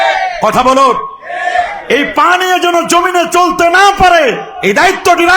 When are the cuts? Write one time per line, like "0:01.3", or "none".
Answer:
0:01.8